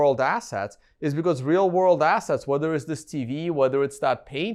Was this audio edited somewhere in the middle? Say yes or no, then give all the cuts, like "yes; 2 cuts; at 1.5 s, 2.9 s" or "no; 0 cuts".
no; 0 cuts